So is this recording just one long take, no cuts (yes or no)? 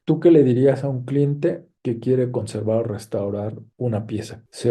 yes